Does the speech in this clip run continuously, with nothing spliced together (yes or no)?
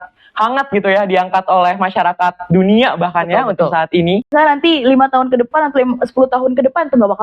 no